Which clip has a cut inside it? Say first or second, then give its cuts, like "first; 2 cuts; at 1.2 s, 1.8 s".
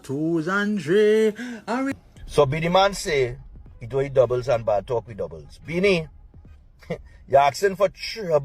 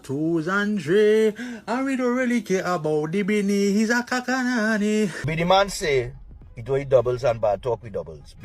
first; 1 cut; at 2.3 s